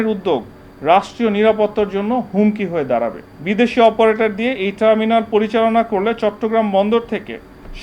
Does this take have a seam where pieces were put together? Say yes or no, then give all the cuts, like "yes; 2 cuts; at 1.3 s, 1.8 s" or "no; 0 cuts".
yes; 1 cut; at 3.3 s